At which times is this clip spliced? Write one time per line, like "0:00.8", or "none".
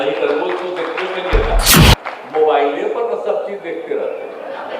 0:01.8